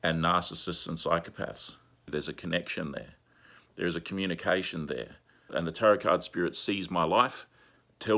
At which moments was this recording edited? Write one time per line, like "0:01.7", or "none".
0:02.1
0:05.5